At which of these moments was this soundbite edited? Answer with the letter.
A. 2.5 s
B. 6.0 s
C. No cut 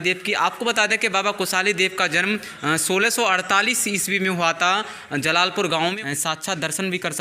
B